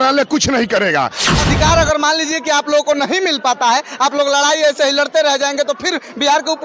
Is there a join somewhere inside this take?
yes; 1 cut; at 1.3 s

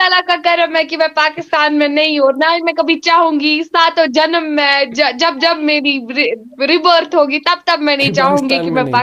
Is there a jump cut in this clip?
no; 0 cuts

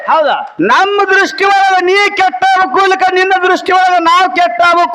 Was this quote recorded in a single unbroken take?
yes; 0 cuts

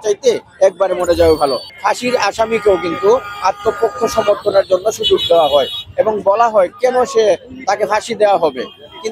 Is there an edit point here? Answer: yes; 1 cut; at 1.7 s

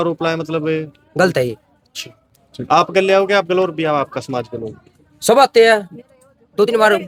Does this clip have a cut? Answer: no; 0 cuts

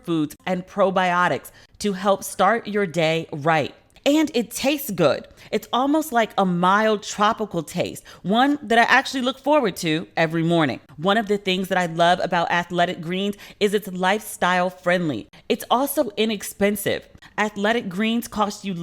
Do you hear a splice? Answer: yes; 3 cuts; at 3.8 s, 10.8 s, 15.3 s

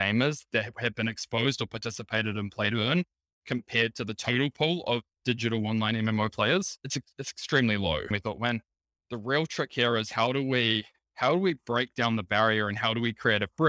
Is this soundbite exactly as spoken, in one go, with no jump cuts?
no; 1 cut; at 8.1 s

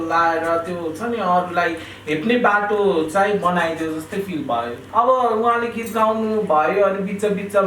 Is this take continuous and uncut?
no; 1 cut; at 4.8 s

